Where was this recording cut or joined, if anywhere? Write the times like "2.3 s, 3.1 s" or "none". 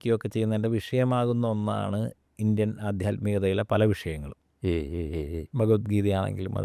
none